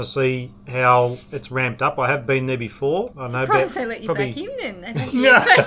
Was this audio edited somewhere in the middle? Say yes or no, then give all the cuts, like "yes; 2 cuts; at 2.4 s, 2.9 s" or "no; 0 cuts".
no; 0 cuts